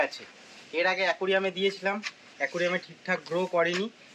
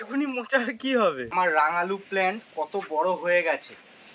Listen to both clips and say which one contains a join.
second; 1 cut; at 1.3 s

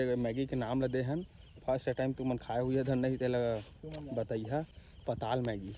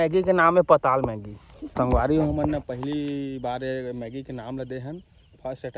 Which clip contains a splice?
second; 1 cut; at 1.7 s

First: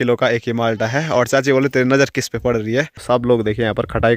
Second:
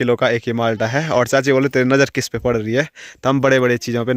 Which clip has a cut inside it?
first; 1 cut; at 3.0 s

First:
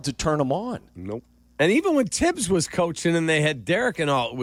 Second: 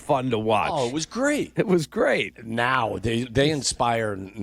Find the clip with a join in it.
second; 2 cuts; at 1.5 s, 2.4 s

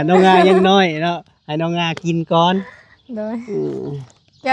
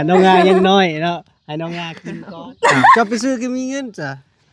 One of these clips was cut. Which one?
second; 1 cut; at 2.0 s

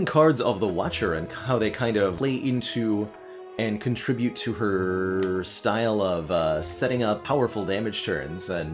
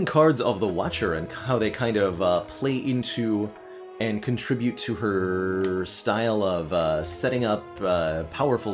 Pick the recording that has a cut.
first; 2 cuts; at 2.1 s, 7.2 s

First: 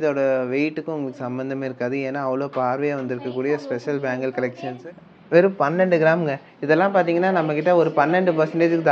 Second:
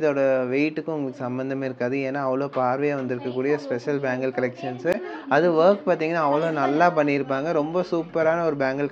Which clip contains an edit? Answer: first; 1 cut; at 4.7 s

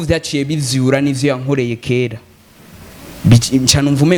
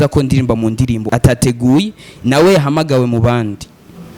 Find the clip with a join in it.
second; 1 cut; at 1.0 s

